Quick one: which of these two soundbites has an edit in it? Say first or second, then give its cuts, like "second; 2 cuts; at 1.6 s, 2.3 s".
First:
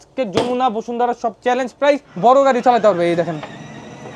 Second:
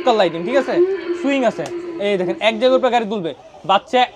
first; 1 cut; at 2.1 s